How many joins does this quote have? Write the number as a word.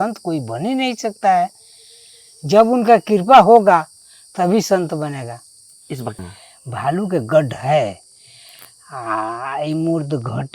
one